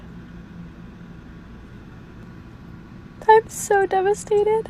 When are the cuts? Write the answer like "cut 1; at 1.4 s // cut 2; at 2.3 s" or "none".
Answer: cut 1; at 2.2 s